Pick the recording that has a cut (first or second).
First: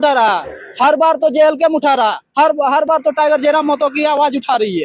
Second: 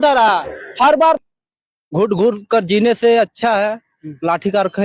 second